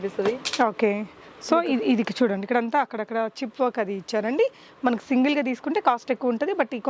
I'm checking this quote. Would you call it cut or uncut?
uncut